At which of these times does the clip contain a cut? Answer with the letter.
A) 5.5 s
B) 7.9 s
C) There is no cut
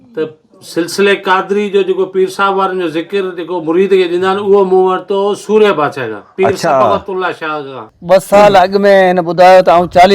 B